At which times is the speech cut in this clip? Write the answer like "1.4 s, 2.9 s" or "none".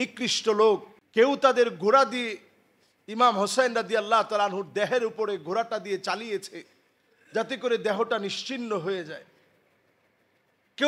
1.0 s